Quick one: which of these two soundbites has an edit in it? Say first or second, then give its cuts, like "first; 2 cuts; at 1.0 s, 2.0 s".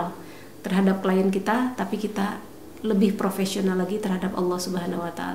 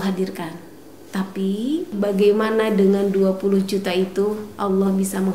second; 1 cut; at 1.9 s